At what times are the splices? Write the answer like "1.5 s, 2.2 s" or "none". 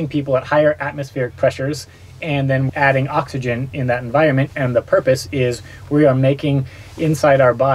2.7 s